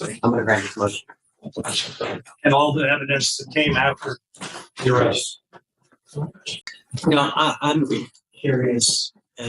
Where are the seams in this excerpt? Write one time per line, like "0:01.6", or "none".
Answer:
0:06.6